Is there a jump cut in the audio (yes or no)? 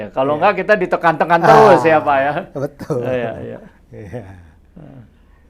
no